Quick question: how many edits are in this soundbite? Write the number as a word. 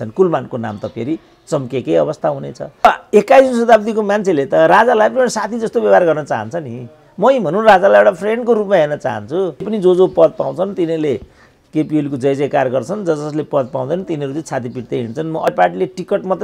three